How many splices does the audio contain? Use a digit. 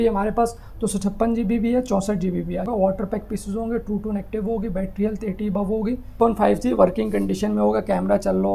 2